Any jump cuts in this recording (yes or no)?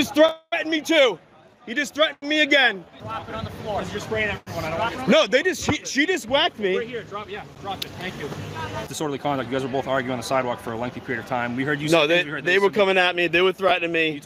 yes